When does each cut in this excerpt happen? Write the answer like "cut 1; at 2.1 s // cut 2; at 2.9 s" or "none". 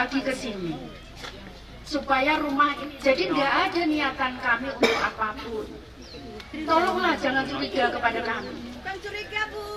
cut 1; at 2.8 s